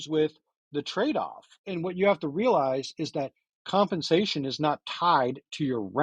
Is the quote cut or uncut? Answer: uncut